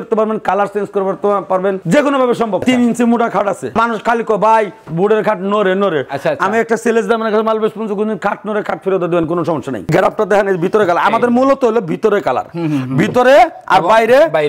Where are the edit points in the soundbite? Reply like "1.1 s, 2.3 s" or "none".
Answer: 2.6 s, 3.7 s, 9.9 s